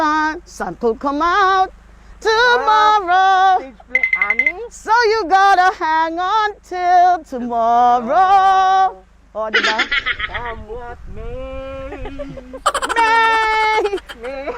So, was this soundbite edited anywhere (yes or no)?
no